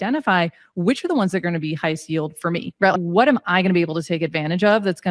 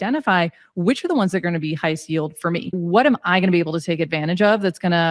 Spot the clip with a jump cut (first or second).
second